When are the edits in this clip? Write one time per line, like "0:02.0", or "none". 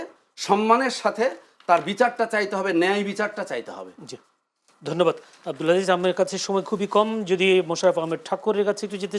none

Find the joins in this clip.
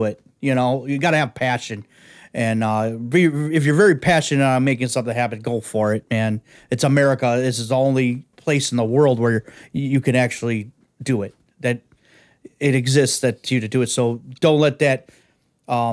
0:08.3

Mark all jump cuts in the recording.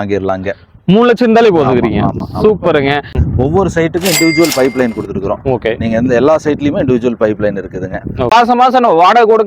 0:03.1
0:08.3

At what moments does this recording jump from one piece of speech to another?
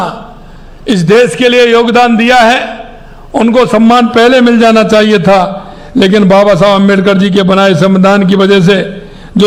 none

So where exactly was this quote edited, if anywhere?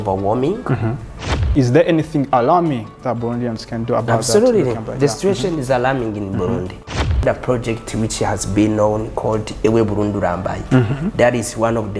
0:01.5
0:07.2

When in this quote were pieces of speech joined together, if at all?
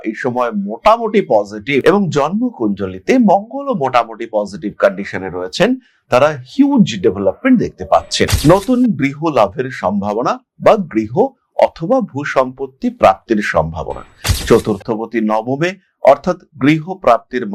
0:08.3

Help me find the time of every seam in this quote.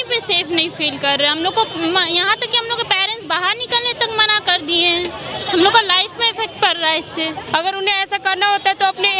0:07.4

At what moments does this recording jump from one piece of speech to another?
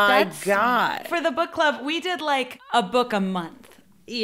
0:01.0
0:02.6

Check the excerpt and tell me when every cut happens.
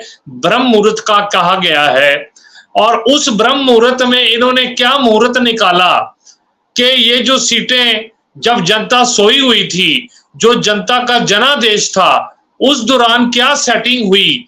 none

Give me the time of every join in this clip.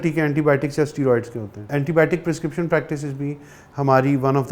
0:01.7

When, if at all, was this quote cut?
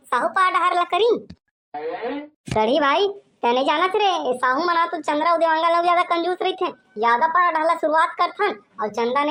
none

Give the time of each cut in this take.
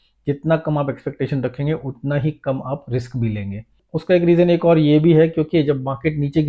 0:03.9

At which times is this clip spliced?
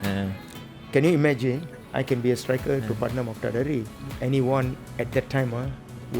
0:01.7
0:04.0
0:04.8

